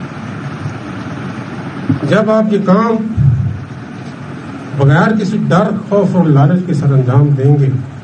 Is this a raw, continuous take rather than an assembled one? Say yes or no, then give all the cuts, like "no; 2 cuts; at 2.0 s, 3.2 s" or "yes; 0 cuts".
yes; 0 cuts